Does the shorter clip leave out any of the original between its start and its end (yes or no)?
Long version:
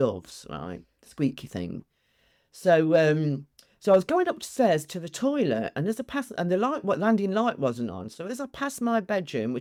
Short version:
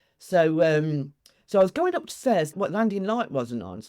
yes